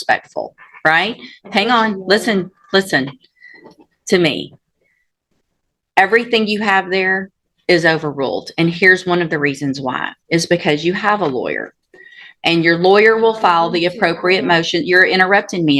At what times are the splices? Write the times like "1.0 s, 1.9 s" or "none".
none

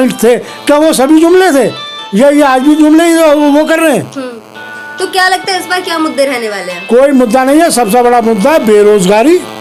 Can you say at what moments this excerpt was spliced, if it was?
none

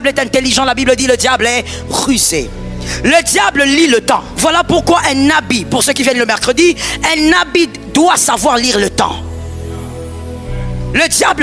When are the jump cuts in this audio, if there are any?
4.3 s

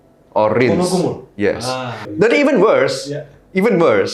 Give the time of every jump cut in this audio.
2.0 s

